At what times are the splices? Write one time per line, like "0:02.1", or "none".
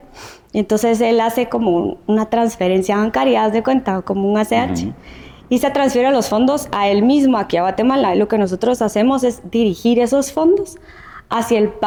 none